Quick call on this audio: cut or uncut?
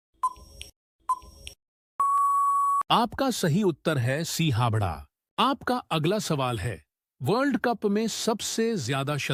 uncut